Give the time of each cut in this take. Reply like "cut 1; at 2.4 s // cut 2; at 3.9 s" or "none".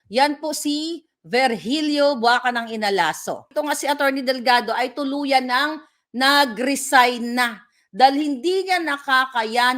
cut 1; at 3.5 s